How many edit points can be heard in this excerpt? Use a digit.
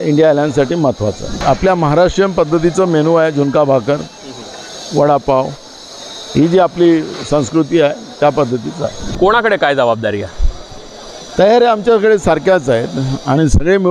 2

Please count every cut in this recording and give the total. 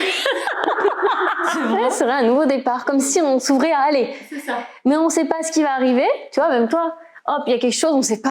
1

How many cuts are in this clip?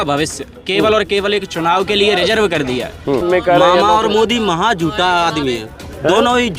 1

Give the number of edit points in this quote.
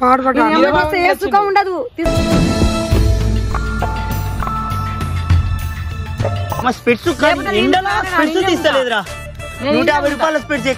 1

